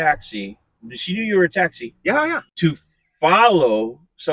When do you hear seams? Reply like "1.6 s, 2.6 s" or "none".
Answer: 2.5 s